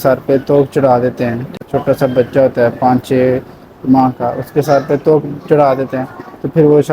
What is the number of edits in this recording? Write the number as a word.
one